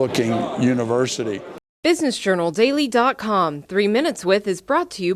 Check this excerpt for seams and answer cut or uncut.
cut